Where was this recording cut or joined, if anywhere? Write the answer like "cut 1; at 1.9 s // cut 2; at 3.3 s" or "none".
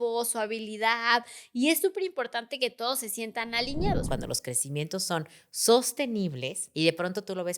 cut 1; at 4.1 s // cut 2; at 6.6 s